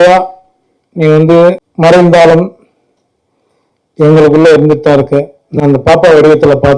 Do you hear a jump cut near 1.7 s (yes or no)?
yes